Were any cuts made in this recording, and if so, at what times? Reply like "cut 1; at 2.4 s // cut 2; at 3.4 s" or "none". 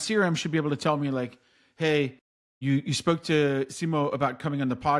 none